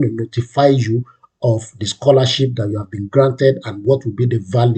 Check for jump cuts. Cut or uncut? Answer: uncut